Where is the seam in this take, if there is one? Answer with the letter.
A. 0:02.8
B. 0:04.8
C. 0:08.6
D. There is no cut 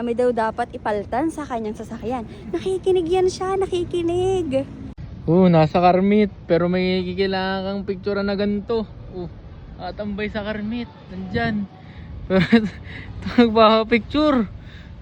B